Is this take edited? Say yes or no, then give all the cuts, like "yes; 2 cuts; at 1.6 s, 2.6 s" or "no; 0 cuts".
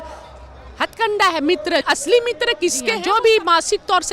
yes; 2 cuts; at 1.8 s, 3.0 s